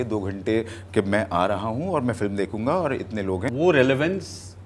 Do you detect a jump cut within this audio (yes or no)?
yes